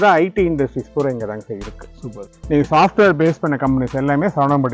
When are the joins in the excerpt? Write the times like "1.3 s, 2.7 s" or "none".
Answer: 2.3 s